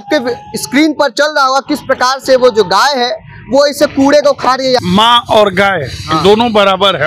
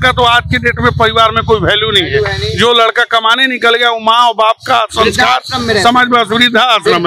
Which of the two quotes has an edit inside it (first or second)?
first